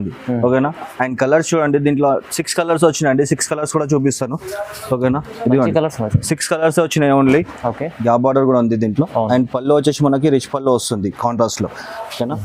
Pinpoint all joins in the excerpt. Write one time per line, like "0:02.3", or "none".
0:07.9